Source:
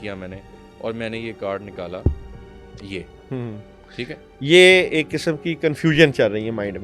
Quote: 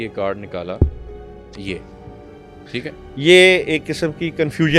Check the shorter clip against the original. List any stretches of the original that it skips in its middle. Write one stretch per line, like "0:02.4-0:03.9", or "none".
none